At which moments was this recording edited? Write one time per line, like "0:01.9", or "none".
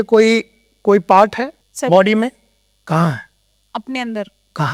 0:01.6